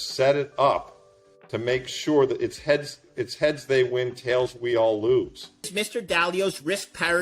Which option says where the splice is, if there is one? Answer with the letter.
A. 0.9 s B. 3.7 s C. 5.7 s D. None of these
C